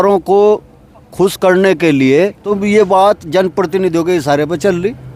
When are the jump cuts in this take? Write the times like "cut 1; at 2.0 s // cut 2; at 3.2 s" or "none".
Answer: cut 1; at 2.4 s